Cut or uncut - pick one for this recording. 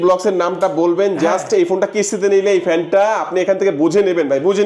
uncut